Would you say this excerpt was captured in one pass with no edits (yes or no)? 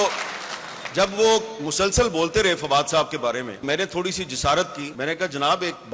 no